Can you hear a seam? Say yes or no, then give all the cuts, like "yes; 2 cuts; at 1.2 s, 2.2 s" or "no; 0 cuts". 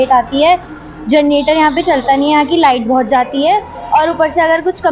no; 0 cuts